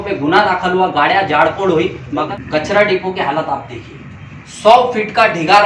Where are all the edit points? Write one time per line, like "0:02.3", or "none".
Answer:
0:02.1